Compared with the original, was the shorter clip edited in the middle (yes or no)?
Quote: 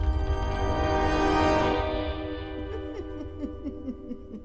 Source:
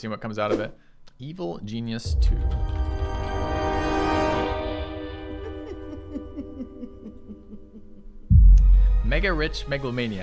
no